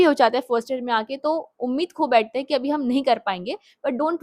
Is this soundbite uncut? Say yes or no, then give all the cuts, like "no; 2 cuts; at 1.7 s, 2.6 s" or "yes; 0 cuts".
yes; 0 cuts